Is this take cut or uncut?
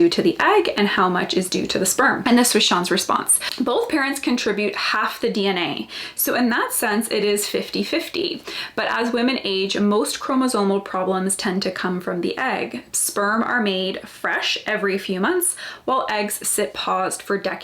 cut